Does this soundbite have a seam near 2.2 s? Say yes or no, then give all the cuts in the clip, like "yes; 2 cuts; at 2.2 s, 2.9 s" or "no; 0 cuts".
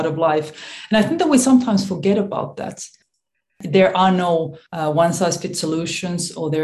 no; 2 cuts; at 3.4 s, 4.6 s